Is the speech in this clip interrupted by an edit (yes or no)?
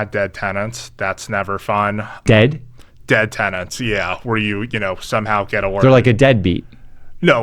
yes